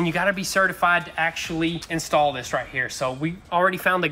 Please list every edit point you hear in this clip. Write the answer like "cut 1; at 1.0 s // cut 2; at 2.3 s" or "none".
cut 1; at 1.8 s